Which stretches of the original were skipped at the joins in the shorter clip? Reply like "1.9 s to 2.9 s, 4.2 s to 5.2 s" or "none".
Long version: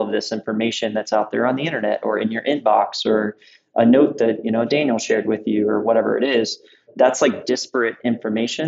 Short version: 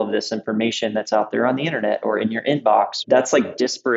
3.0 s to 6.8 s